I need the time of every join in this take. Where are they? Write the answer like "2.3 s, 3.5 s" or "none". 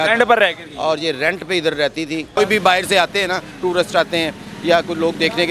2.4 s